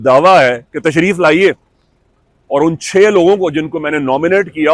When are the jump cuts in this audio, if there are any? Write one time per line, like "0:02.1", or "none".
none